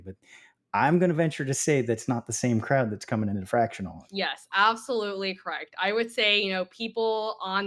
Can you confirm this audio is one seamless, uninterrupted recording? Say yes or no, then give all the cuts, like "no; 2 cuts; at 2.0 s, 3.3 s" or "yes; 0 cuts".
no; 1 cut; at 4.0 s